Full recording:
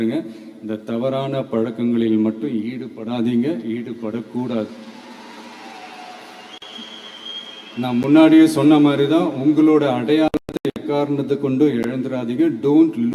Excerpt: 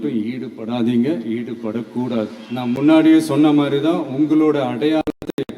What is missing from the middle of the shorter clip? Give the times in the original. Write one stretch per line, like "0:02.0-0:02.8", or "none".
0:04.8-0:07.7

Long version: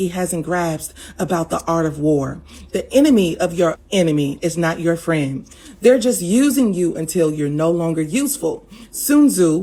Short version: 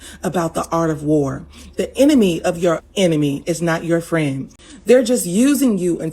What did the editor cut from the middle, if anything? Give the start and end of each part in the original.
none

